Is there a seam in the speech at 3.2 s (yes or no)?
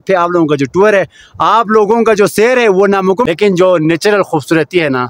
yes